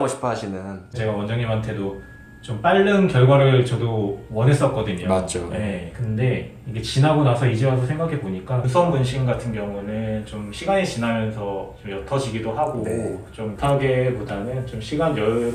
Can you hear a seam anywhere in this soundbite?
yes; 3 cuts; at 1.0 s, 8.7 s, 13.5 s

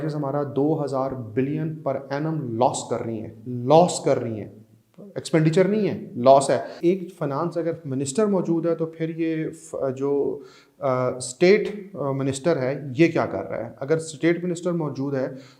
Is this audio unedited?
no; 1 cut; at 6.8 s

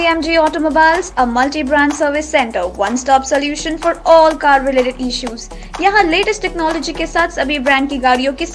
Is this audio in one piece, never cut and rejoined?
yes; 0 cuts

